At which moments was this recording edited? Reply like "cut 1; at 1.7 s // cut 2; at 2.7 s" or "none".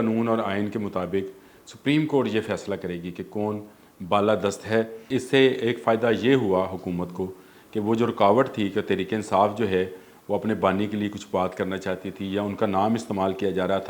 cut 1; at 5.0 s